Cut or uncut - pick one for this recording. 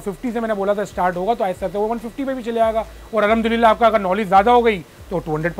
uncut